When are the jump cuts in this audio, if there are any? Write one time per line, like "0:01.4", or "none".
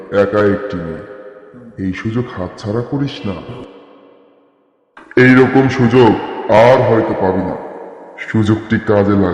none